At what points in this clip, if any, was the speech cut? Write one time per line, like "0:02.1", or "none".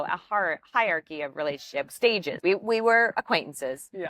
0:02.3